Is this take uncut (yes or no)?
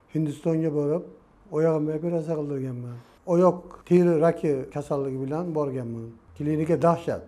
no